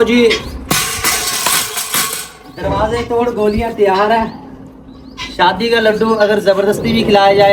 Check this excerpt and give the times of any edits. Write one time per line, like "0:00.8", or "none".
none